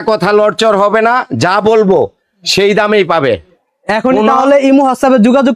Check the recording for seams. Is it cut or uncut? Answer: uncut